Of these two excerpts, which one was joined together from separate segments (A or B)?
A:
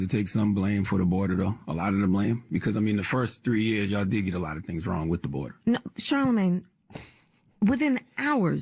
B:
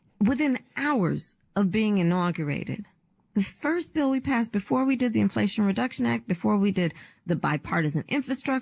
B